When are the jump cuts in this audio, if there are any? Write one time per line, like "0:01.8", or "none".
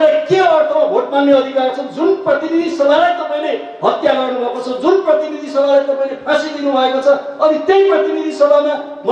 none